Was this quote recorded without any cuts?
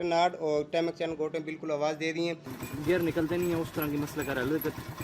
no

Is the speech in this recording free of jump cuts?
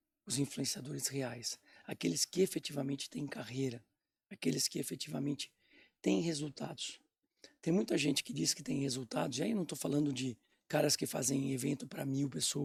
yes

